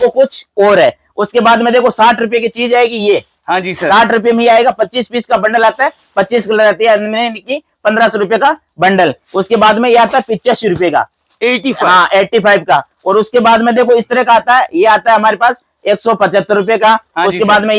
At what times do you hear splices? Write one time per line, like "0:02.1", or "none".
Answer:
none